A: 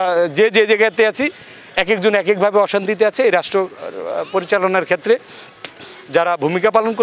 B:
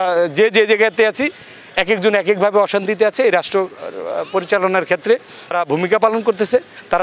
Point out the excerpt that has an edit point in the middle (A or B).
B